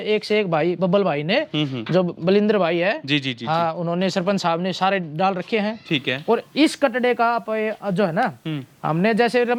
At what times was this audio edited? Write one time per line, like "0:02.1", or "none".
none